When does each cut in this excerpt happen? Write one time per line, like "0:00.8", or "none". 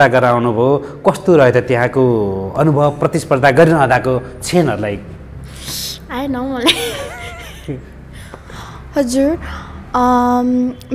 none